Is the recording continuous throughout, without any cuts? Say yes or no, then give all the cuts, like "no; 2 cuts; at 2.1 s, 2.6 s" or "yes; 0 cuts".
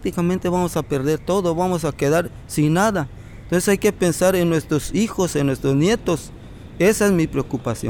yes; 0 cuts